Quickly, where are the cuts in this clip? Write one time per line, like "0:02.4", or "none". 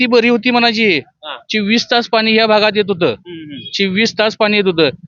none